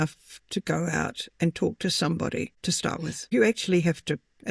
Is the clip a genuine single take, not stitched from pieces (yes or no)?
no